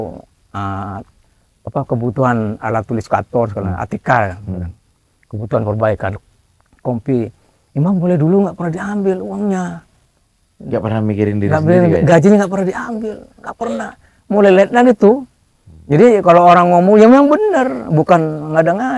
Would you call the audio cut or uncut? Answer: uncut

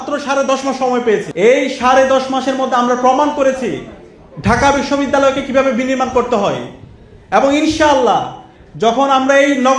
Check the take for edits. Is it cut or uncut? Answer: cut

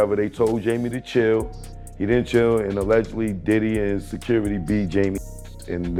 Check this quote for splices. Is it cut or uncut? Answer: uncut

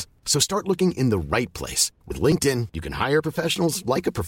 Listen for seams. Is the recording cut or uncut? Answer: uncut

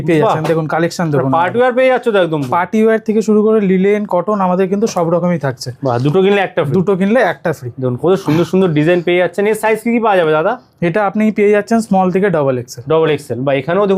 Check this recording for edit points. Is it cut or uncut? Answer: uncut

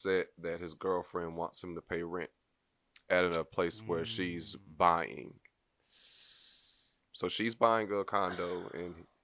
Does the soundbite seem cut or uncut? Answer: uncut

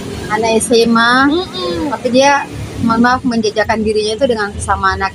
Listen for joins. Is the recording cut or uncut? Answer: uncut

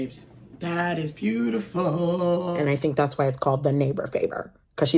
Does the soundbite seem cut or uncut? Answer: cut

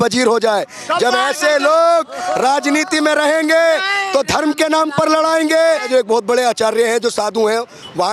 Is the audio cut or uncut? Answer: cut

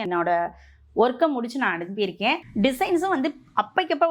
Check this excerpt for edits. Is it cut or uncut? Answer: cut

